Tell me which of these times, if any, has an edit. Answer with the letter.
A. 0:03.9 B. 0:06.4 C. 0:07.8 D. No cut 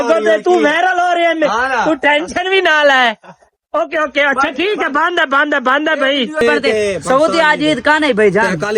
B